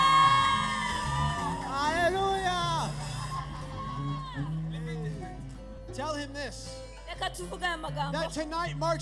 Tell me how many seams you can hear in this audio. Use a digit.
1